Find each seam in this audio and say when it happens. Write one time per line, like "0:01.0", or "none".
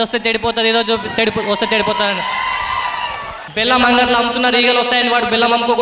0:03.4